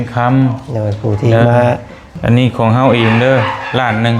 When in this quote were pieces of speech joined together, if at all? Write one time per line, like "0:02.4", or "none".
0:02.1